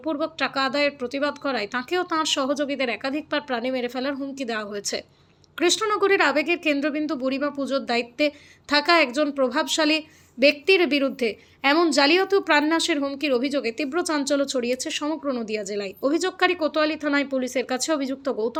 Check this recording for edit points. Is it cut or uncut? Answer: uncut